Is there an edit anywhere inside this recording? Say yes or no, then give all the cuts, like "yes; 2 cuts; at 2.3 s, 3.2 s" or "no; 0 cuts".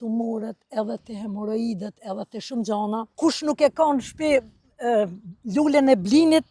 yes; 1 cut; at 3.1 s